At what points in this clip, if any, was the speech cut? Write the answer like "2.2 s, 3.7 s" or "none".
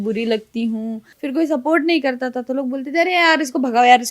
1.1 s